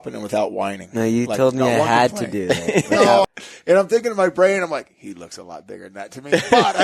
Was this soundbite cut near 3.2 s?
yes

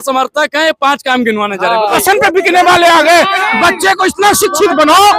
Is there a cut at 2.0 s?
yes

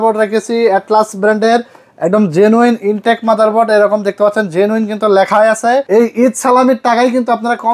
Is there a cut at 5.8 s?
yes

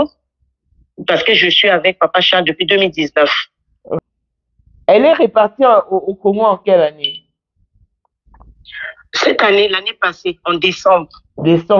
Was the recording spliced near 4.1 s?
yes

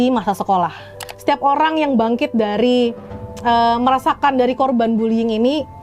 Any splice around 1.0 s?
yes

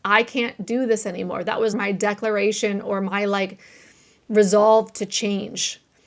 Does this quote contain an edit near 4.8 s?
no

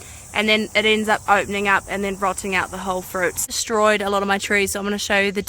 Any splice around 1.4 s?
no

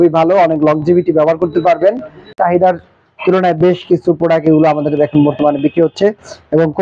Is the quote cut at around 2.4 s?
yes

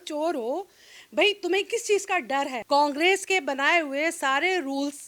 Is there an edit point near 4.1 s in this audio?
no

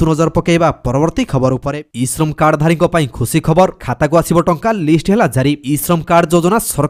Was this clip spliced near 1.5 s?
no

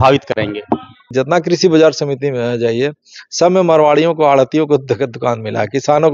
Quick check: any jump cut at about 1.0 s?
yes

